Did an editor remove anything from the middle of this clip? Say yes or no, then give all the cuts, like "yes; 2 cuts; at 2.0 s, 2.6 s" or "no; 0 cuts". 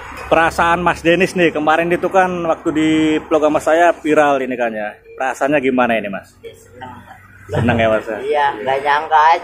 no; 0 cuts